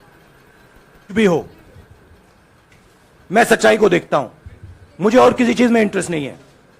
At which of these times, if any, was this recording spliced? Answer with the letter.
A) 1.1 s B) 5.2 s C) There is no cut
A